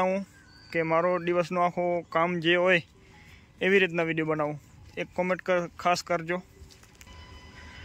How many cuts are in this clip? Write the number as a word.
zero